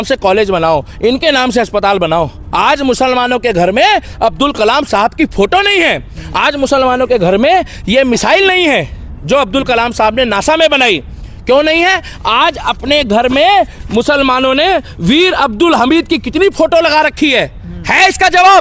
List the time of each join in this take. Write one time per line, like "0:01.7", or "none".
none

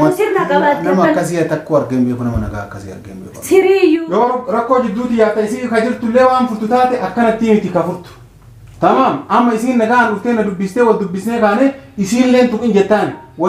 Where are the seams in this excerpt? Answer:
0:04.1

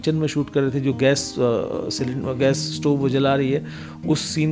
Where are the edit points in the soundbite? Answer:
none

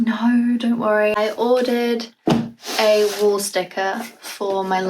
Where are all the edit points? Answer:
0:01.2

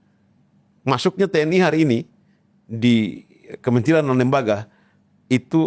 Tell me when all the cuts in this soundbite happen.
none

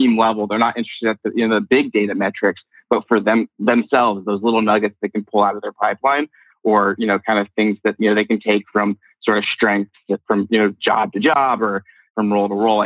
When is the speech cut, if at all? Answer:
0:10.2
0:12.0

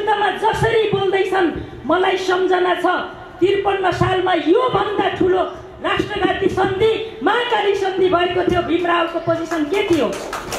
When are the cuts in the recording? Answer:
0:01.5

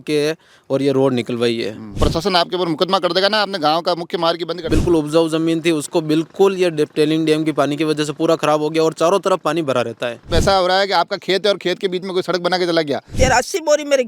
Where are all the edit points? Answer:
0:02.0
0:04.7
0:10.2
0:13.1

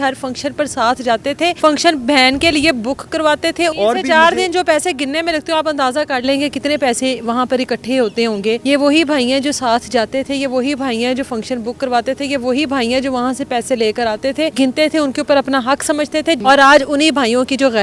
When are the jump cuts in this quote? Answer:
0:01.6
0:03.7
0:08.6
0:14.5
0:16.4

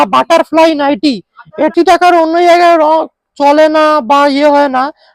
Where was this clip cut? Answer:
0:01.7

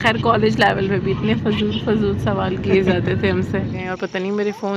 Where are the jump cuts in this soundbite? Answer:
0:03.8

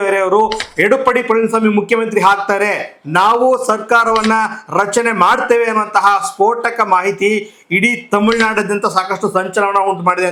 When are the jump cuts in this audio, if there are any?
none

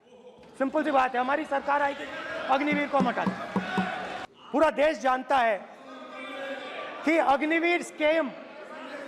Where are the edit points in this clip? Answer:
0:04.2

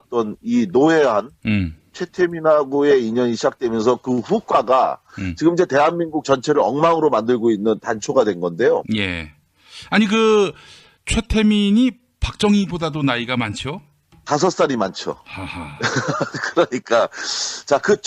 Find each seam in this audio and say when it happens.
0:12.5

